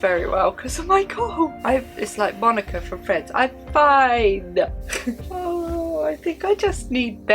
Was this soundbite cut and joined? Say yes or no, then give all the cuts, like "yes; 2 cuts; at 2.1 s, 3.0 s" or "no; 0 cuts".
yes; 2 cuts; at 1.6 s, 5.3 s